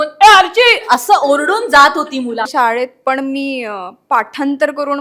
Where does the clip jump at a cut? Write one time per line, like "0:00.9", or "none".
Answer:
0:02.5